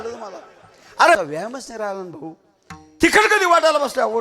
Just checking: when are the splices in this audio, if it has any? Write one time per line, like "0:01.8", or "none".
0:01.2